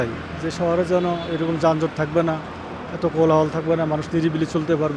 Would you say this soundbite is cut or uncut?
uncut